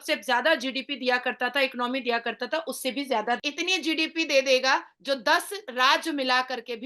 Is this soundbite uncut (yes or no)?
no